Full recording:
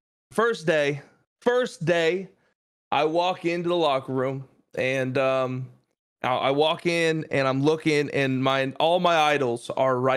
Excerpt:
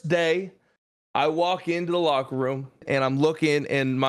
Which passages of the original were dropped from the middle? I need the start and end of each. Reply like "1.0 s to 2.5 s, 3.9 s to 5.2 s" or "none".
4.6 s to 7.2 s